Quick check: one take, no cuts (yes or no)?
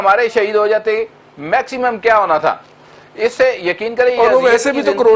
yes